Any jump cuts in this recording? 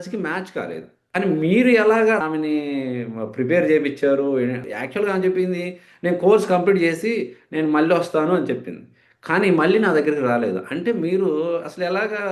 yes; 3 cuts; at 0.9 s, 2.2 s, 4.7 s

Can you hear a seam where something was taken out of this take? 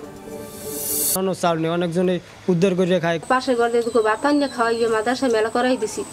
yes; 1 cut; at 1.2 s

